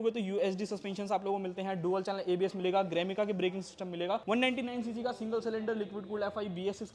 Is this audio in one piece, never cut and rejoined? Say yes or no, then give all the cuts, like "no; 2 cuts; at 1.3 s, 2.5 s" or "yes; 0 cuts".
no; 1 cut; at 4.2 s